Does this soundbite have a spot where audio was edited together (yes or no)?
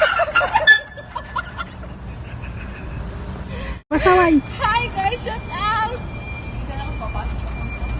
yes